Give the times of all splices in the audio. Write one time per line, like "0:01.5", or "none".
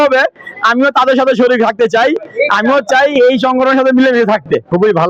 none